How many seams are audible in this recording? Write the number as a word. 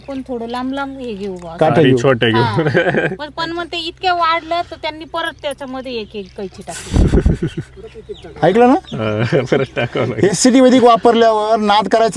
zero